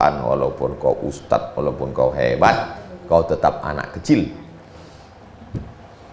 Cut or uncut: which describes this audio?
uncut